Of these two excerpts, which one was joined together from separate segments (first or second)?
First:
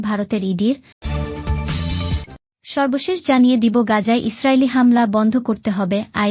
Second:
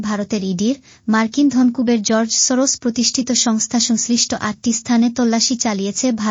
first